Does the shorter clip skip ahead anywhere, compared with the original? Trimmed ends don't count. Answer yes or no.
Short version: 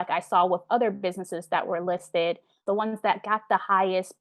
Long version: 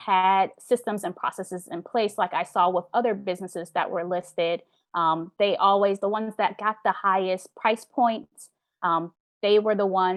yes